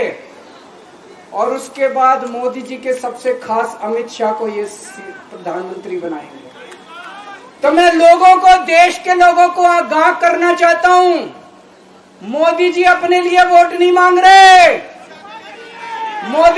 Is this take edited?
no; 0 cuts

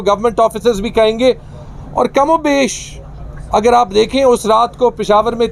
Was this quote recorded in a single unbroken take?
yes; 0 cuts

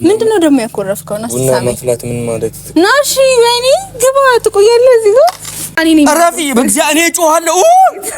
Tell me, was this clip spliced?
yes; 1 cut; at 5.7 s

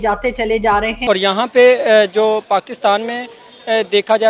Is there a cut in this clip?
no; 0 cuts

